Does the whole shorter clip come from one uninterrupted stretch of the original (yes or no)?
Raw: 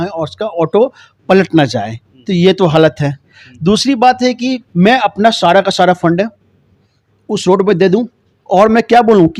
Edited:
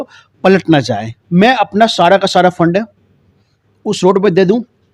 no